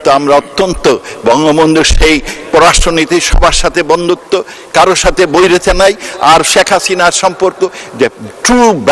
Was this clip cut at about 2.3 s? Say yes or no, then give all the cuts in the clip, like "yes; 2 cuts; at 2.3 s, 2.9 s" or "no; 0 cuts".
no; 0 cuts